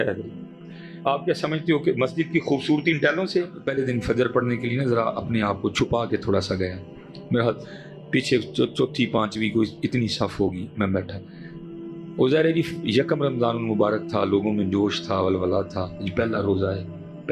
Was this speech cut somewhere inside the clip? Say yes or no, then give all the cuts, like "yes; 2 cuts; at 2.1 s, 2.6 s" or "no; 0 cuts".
yes; 1 cut; at 3.6 s